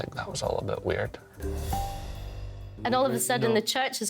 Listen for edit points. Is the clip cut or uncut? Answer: cut